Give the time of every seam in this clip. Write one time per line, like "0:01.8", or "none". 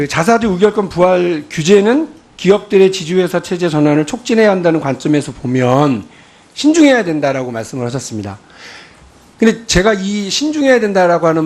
0:09.1